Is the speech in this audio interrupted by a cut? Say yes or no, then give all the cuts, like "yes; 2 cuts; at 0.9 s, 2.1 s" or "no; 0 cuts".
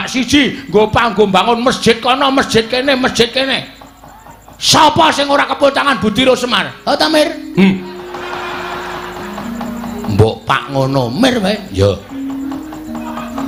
no; 0 cuts